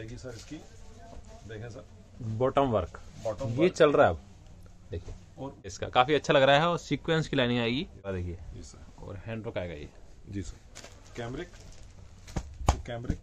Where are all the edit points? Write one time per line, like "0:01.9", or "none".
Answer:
0:05.8
0:08.1